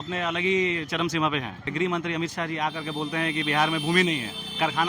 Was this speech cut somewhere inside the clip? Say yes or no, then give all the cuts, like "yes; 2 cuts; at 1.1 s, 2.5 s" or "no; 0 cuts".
yes; 1 cut; at 1.7 s